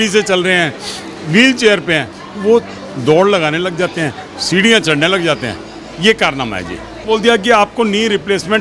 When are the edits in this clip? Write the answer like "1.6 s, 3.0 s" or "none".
7.0 s